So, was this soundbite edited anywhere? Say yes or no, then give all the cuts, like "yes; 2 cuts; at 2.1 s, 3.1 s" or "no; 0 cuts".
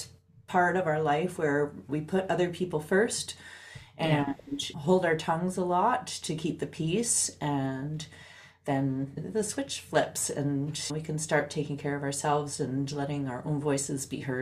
yes; 2 cuts; at 9.2 s, 10.9 s